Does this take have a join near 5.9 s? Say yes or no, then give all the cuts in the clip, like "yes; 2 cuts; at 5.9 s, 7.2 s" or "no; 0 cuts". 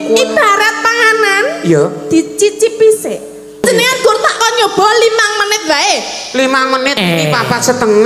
no; 1 cut; at 3.6 s